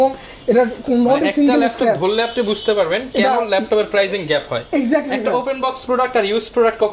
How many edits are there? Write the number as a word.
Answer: zero